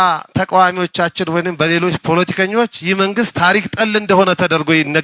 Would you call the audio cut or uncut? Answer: uncut